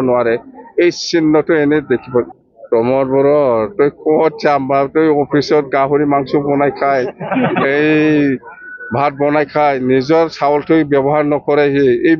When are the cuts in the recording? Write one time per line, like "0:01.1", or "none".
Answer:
0:02.4